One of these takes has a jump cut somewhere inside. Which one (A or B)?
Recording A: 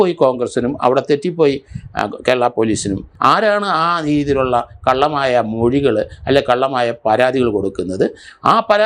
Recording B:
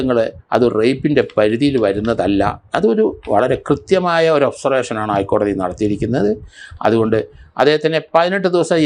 A